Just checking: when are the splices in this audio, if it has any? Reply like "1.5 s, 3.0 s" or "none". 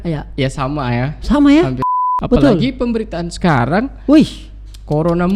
2.0 s